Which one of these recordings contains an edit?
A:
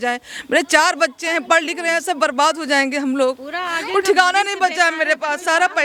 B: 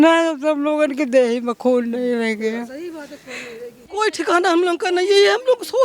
B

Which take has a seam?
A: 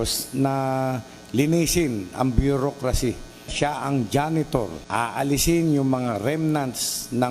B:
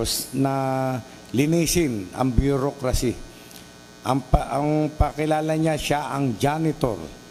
A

